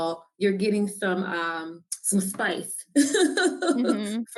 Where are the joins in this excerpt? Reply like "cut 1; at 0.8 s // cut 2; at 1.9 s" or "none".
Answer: none